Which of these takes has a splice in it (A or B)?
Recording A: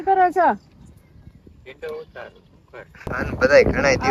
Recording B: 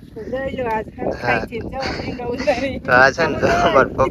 A